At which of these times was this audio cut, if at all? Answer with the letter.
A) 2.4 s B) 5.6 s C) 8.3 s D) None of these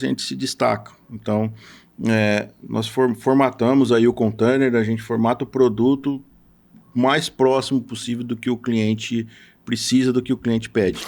D